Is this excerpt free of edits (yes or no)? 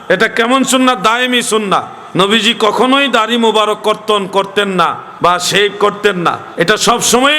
no